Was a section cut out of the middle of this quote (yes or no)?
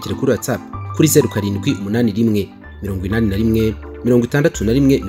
no